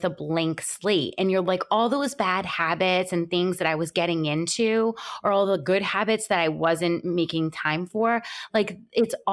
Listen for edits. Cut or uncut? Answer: uncut